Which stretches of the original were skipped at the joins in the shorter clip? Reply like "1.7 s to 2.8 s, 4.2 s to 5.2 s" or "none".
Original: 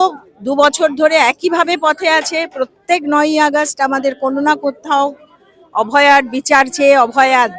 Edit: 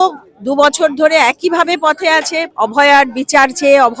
2.5 s to 5.6 s